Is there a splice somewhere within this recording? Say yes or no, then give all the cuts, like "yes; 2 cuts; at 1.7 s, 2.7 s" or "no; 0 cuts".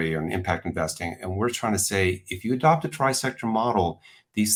no; 0 cuts